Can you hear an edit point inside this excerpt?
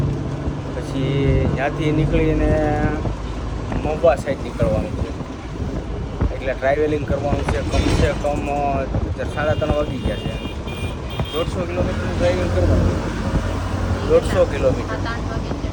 no; 0 cuts

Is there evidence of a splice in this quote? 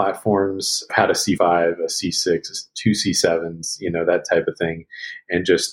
yes; 1 cut; at 1.3 s

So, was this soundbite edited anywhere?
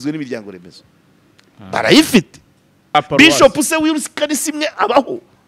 yes; 1 cut; at 2.9 s

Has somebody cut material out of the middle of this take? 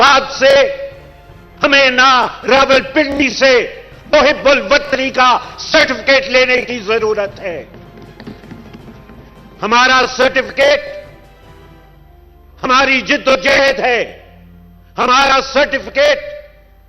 no; 0 cuts

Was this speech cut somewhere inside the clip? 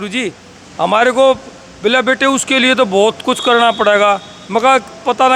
no; 0 cuts

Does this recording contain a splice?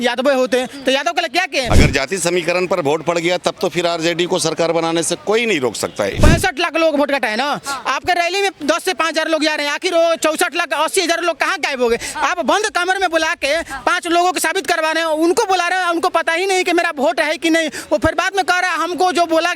yes; 2 cuts; at 1.7 s, 6.2 s

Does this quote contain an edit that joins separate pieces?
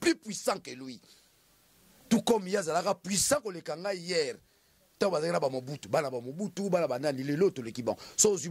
no; 0 cuts

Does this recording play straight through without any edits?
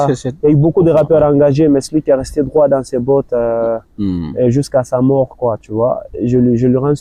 yes; 0 cuts

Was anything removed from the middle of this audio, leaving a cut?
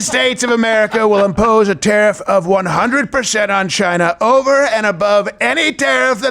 no; 0 cuts

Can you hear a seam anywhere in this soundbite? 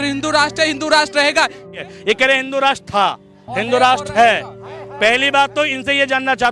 yes; 1 cut; at 1.8 s

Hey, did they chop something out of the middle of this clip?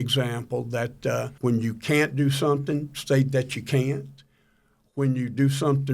yes; 1 cut; at 1.3 s

